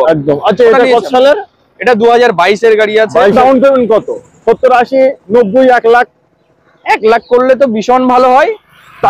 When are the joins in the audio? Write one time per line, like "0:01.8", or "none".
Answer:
0:03.3